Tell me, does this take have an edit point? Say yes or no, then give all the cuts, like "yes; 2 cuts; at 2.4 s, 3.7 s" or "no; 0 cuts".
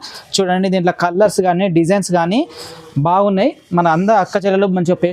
no; 0 cuts